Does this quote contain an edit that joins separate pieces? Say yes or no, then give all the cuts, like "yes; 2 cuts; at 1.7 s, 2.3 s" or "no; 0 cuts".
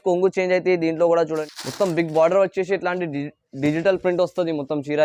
yes; 1 cut; at 1.4 s